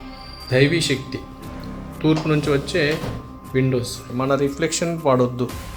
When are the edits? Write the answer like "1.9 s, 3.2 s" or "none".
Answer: 4.3 s